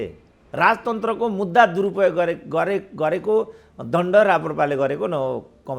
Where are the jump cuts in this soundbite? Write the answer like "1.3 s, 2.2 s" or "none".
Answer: none